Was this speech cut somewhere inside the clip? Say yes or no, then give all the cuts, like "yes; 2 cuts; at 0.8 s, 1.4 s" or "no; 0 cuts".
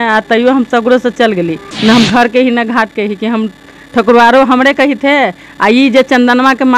yes; 1 cut; at 1.6 s